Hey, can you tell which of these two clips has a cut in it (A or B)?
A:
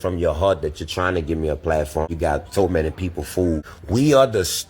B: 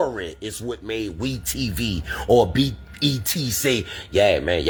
A